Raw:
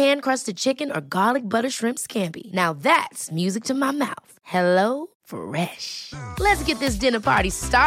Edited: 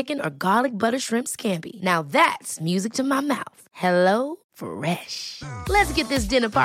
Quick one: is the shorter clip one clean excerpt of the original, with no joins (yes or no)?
yes